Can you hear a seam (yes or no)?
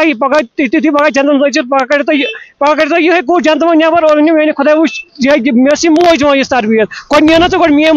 no